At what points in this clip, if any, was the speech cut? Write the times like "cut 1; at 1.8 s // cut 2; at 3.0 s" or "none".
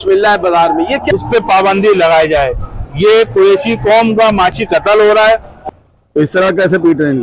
cut 1; at 1.0 s // cut 2; at 5.8 s